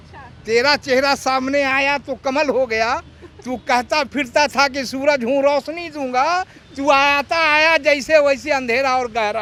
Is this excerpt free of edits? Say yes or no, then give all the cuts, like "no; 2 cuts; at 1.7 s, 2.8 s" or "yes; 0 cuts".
yes; 0 cuts